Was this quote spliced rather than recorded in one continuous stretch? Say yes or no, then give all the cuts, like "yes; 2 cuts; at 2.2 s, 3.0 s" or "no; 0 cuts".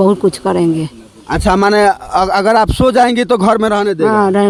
no; 0 cuts